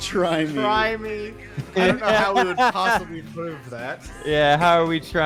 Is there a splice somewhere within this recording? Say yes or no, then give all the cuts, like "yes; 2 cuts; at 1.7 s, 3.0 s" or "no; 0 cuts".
no; 0 cuts